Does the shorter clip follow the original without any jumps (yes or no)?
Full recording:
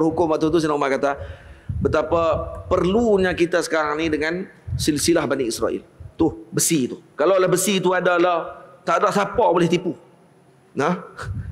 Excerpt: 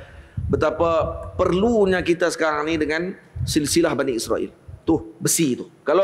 yes